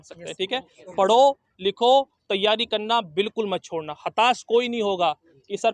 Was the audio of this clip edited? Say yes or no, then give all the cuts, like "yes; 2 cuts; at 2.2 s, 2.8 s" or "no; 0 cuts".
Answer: no; 0 cuts